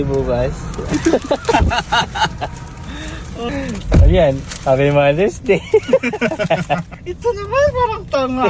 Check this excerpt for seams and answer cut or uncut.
cut